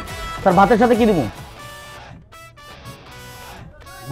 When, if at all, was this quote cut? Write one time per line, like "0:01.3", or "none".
none